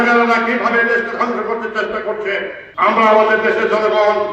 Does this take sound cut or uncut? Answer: cut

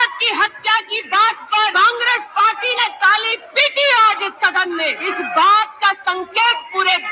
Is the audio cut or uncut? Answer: cut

